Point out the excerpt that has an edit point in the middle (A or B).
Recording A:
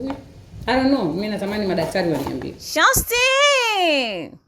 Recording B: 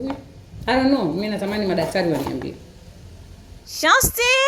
A